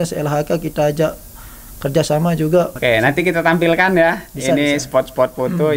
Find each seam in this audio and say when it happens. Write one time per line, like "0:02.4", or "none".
0:02.7